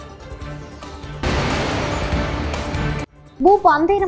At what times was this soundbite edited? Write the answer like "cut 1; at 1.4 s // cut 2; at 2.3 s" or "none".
cut 1; at 1.0 s

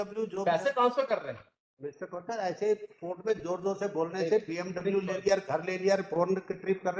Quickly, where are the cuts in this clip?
none

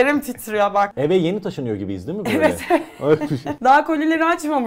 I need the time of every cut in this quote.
cut 1; at 0.9 s // cut 2; at 3.5 s

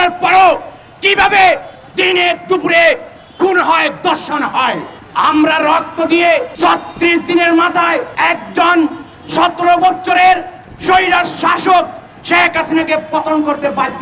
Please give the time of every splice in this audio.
cut 1; at 4.9 s // cut 2; at 6.5 s // cut 3; at 8.1 s

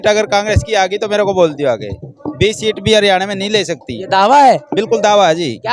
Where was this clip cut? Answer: none

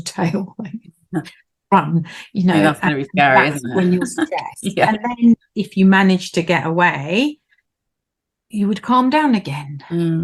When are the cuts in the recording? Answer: none

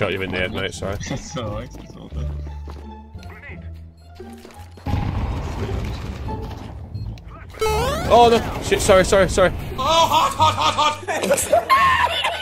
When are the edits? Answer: none

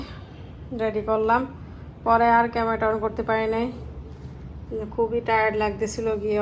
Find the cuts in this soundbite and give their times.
none

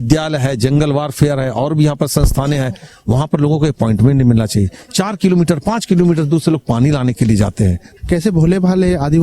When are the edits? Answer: cut 1; at 7.9 s

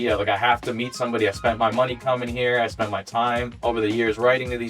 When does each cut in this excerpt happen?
cut 1; at 3.5 s

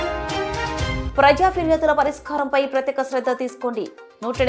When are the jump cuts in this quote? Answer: cut 1; at 1.0 s

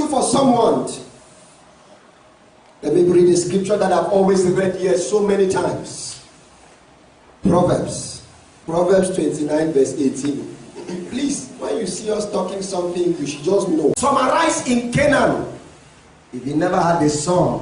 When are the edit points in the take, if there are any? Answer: cut 1; at 14.0 s

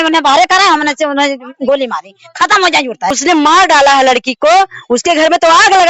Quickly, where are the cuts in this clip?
cut 1; at 3.2 s

